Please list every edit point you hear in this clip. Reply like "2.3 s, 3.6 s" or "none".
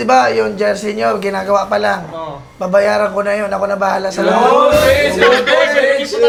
none